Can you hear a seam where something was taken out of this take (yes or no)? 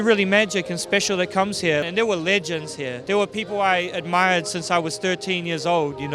yes